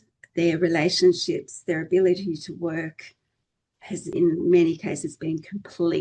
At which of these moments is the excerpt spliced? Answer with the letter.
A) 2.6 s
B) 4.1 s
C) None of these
B